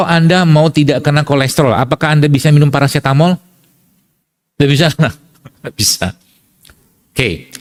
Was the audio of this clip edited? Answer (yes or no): no